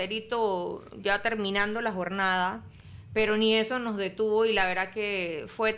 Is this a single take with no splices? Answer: yes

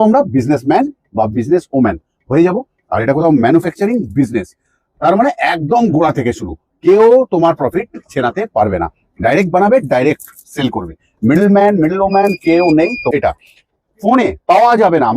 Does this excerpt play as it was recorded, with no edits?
no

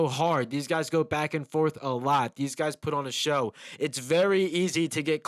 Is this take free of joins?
yes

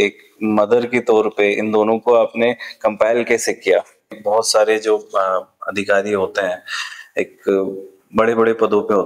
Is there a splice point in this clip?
yes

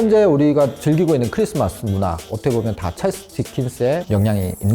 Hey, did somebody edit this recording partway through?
yes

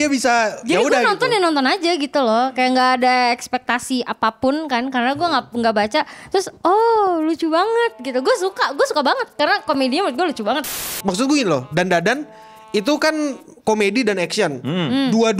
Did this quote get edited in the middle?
yes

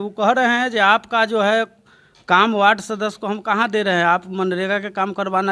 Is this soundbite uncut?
yes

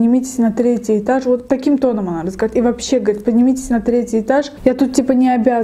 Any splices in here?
no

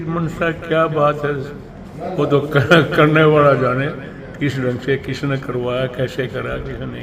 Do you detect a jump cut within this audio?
no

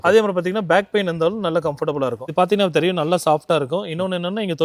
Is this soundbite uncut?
no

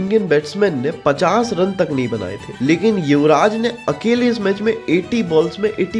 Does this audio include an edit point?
no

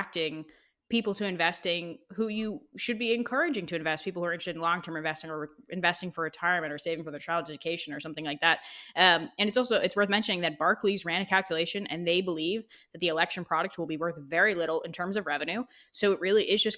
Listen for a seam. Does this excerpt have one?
no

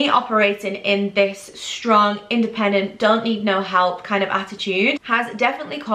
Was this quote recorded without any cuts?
yes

